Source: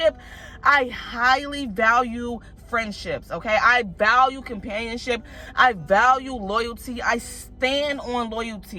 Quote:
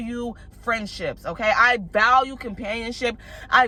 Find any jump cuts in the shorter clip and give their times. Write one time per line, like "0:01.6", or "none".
none